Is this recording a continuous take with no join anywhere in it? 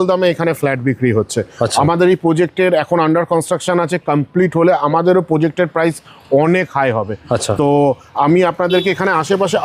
yes; 0 cuts

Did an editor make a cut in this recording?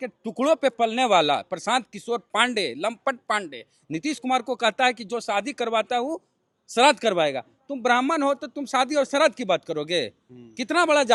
no; 0 cuts

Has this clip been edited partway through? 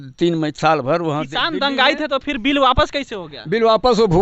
no; 0 cuts

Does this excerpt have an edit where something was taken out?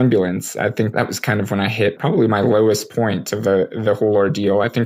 yes; 2 cuts; at 0.9 s, 2.0 s

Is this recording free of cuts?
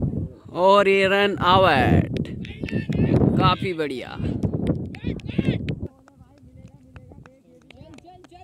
yes; 0 cuts

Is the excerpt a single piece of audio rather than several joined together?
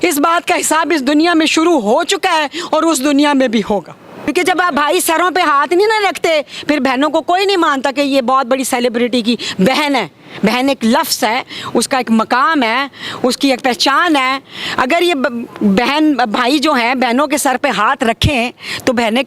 no; 1 cut; at 4.3 s

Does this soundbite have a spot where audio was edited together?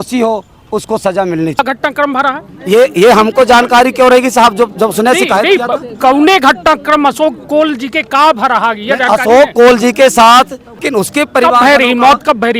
yes; 2 cuts; at 1.6 s, 10.8 s

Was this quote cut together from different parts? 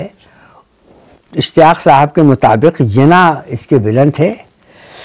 no; 0 cuts

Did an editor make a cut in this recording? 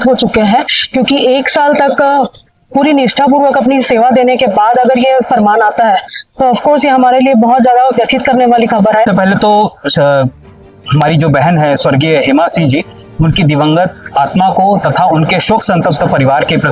yes; 1 cut; at 9.1 s

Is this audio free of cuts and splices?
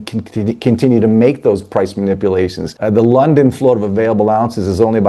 no; 1 cut; at 2.7 s

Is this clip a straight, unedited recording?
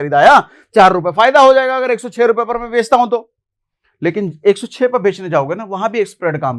yes; 0 cuts

